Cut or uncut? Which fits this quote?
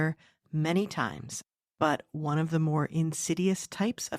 cut